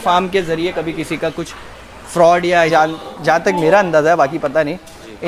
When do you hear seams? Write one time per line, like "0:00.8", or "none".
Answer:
0:02.7